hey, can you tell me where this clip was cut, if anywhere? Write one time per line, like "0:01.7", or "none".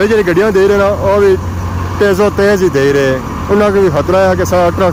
none